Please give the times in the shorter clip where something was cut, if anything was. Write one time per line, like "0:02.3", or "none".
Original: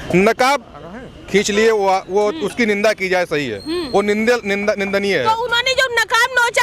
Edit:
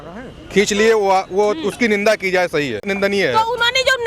0:02.9